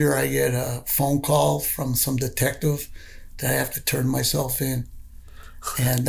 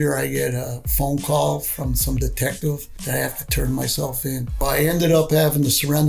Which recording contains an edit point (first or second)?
second